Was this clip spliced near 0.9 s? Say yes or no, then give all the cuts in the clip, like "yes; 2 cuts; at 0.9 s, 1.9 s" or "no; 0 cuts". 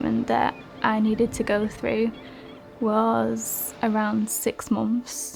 no; 0 cuts